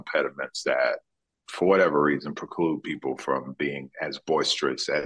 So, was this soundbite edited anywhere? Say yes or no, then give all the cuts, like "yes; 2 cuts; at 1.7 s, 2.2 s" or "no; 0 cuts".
no; 0 cuts